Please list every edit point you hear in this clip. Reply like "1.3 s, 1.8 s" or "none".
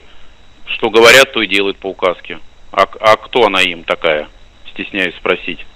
none